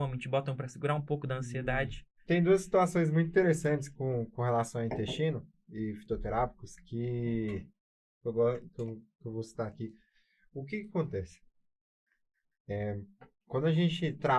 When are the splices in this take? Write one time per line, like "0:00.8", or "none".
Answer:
none